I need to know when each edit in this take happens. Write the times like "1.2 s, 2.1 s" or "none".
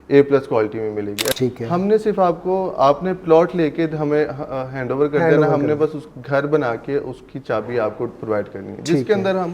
1.3 s